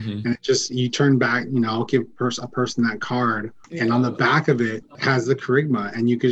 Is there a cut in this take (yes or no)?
yes